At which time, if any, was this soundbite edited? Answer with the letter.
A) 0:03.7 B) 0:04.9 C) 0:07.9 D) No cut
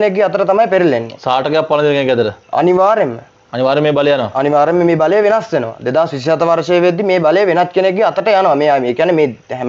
D